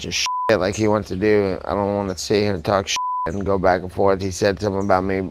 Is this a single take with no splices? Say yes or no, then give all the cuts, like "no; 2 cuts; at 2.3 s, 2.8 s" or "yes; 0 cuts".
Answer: yes; 0 cuts